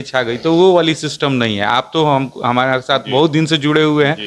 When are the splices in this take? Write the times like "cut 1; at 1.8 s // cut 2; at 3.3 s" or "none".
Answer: none